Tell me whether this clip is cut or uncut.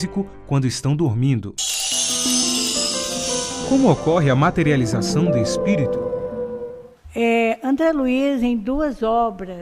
cut